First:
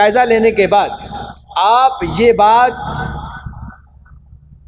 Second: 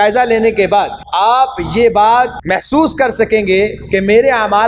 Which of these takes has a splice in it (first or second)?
second